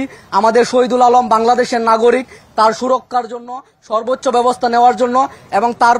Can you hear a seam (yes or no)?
no